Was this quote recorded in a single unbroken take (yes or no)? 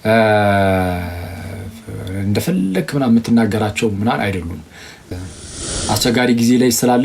no